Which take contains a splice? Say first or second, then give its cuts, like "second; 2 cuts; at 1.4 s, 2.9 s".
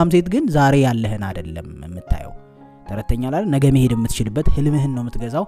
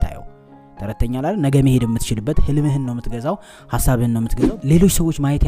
second; 1 cut; at 4.4 s